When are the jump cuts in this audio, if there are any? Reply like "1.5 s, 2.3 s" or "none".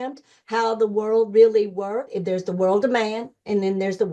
2.1 s